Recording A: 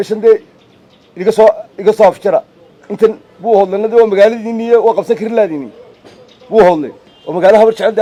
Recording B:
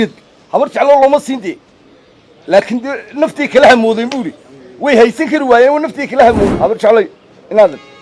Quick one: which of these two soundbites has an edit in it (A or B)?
B